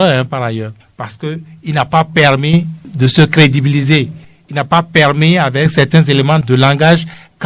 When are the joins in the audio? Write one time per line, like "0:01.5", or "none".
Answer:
none